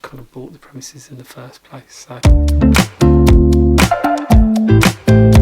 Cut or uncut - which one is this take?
cut